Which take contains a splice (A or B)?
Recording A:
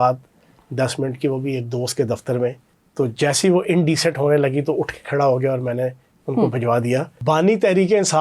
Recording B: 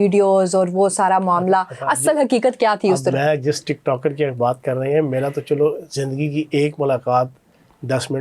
A